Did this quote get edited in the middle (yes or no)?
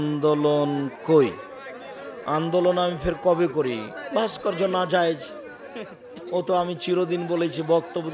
no